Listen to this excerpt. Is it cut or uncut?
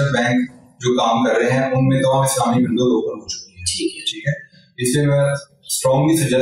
uncut